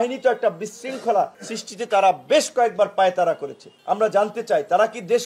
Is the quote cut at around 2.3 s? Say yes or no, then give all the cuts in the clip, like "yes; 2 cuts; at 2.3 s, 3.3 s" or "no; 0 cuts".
no; 1 cut; at 3.8 s